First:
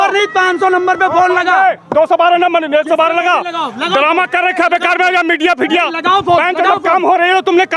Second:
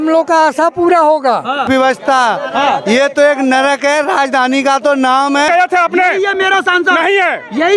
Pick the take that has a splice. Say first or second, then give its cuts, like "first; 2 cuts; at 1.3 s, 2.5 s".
second; 2 cuts; at 1.7 s, 5.5 s